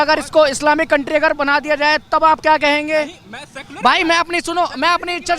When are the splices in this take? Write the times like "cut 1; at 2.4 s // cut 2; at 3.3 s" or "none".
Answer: none